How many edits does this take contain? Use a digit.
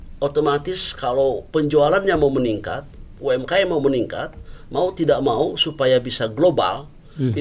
0